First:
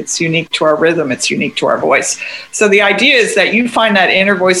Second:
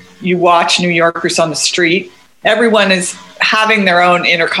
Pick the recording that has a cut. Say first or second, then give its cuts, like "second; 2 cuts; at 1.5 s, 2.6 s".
second; 1 cut; at 2.2 s